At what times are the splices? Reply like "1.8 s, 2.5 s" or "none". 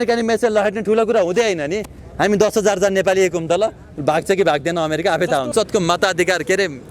5.5 s